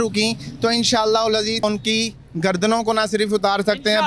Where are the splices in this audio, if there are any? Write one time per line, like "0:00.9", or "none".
0:01.6

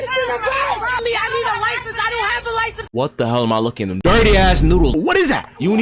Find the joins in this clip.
0:01.0

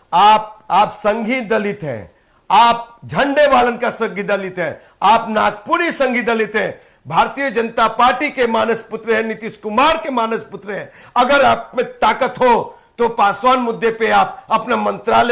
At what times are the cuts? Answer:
none

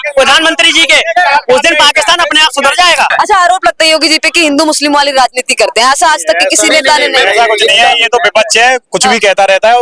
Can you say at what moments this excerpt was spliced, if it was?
0:03.1

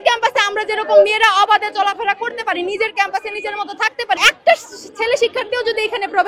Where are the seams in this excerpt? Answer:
0:04.2

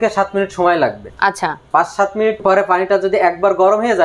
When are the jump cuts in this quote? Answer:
none

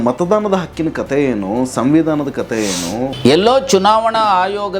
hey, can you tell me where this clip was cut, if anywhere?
0:03.1

